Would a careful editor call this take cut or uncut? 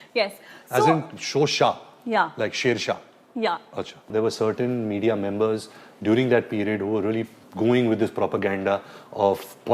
cut